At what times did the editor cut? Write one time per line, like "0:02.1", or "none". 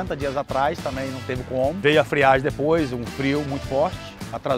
0:01.8